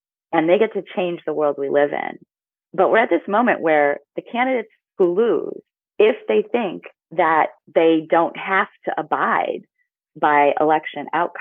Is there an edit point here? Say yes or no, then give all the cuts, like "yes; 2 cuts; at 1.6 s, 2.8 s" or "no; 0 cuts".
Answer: no; 0 cuts